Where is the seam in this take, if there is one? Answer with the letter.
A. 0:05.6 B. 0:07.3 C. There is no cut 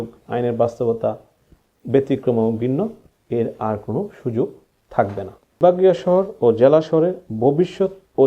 A